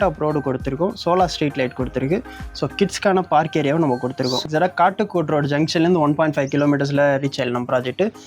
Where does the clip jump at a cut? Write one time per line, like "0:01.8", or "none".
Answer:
0:04.5